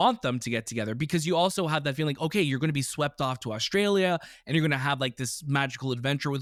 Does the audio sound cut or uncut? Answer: uncut